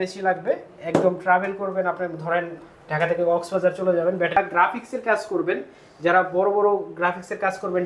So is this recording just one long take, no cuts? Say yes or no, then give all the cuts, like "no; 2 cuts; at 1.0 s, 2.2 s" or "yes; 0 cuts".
no; 1 cut; at 4.3 s